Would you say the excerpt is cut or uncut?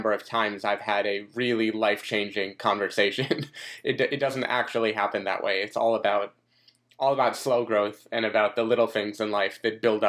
uncut